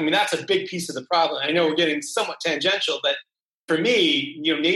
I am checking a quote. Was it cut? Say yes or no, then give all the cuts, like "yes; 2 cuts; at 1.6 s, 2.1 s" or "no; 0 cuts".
yes; 1 cut; at 3.6 s